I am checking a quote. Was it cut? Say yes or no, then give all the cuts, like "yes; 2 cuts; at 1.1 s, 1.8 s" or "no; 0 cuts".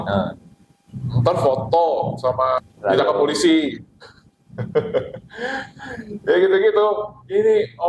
yes; 1 cut; at 2.6 s